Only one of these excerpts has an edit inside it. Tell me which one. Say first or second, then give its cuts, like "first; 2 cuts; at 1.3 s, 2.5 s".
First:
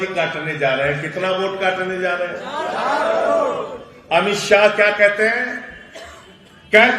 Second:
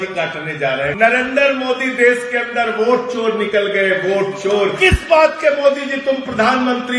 second; 2 cuts; at 0.9 s, 4.8 s